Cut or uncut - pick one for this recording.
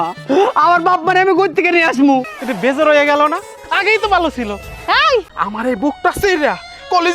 cut